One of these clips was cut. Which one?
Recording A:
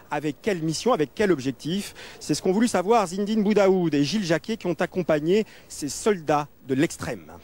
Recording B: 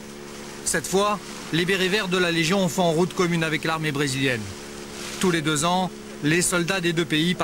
A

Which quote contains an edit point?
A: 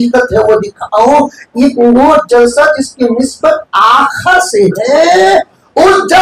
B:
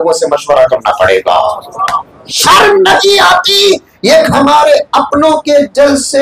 B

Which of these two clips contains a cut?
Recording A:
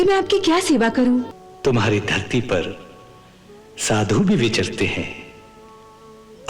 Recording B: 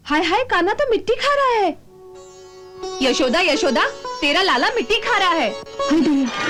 A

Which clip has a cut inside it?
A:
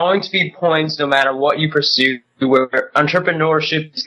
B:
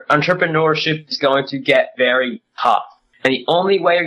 B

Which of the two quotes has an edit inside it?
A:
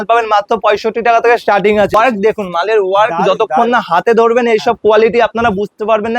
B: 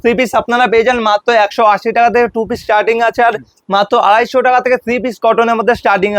A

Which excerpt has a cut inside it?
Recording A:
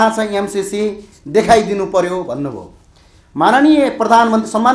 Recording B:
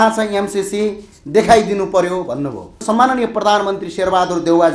B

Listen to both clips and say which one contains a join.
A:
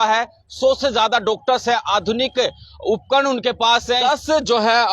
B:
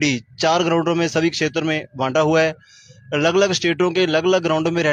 A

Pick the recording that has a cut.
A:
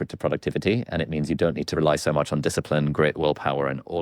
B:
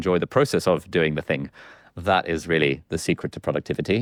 A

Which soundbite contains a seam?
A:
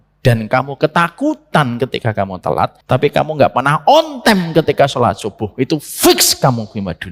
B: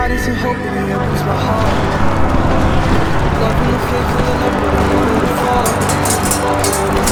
A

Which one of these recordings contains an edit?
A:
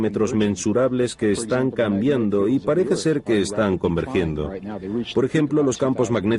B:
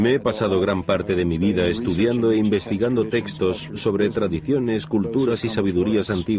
B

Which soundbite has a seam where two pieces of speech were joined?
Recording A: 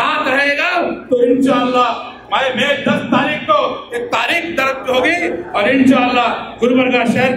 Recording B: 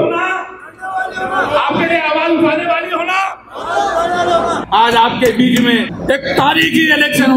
B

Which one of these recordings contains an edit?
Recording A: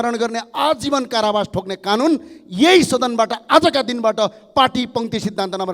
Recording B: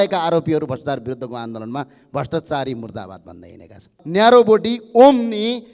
B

